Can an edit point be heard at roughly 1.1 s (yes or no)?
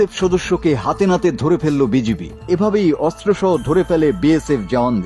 no